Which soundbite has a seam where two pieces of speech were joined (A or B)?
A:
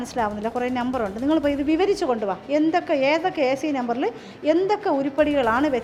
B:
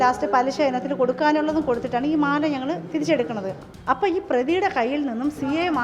B